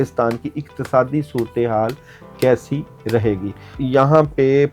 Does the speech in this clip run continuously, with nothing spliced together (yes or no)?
no